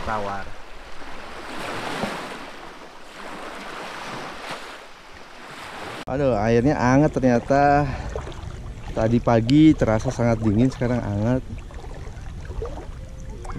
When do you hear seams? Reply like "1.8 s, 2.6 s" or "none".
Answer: 5.9 s